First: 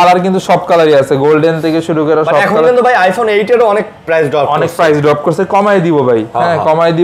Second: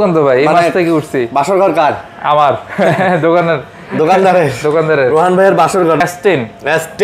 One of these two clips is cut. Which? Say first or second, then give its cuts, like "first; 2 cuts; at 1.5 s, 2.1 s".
second; 1 cut; at 6.0 s